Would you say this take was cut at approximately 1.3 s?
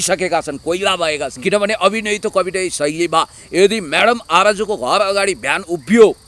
yes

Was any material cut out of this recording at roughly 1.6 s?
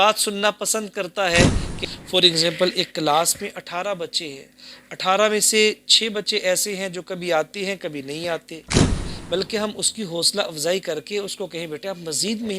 yes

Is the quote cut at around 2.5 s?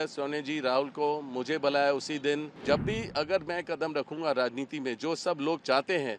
yes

